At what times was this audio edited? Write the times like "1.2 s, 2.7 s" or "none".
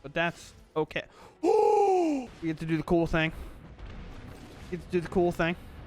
2.3 s